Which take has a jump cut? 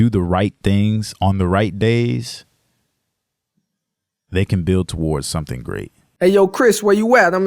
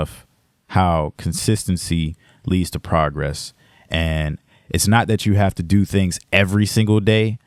first; 1 cut; at 6.0 s

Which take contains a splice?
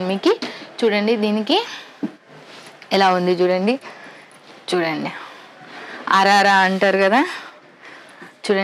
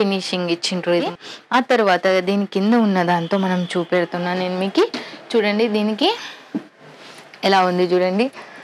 second; 1 cut; at 1.1 s

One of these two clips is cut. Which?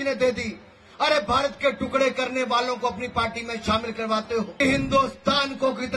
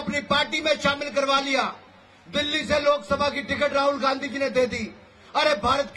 first; 1 cut; at 4.5 s

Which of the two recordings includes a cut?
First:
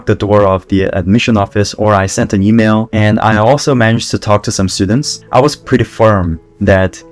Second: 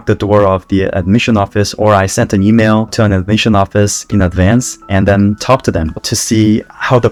first; 2 cuts; at 2.9 s, 5.1 s

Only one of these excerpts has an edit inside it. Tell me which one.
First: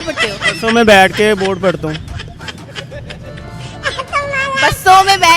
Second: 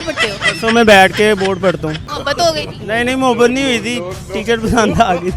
second; 1 cut; at 2.1 s

